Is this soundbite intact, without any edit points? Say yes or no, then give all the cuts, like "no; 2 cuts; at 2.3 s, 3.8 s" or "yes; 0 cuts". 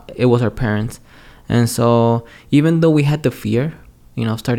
yes; 0 cuts